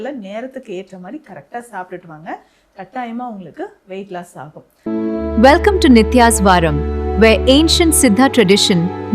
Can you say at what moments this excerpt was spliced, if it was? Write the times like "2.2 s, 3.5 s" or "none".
4.7 s